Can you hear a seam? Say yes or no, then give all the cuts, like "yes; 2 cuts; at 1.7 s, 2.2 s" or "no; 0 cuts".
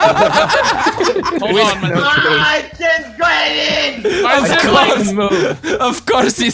yes; 1 cut; at 1.4 s